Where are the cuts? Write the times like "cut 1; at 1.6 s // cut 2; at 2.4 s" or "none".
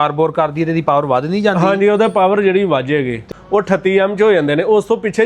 cut 1; at 3.2 s